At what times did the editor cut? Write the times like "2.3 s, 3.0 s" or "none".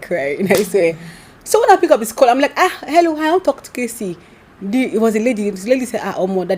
none